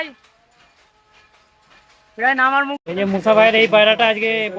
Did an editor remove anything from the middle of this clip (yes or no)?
yes